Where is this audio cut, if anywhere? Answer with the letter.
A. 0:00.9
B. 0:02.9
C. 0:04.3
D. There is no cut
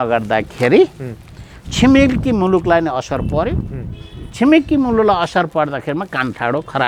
D